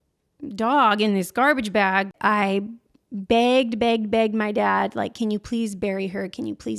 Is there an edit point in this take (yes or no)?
yes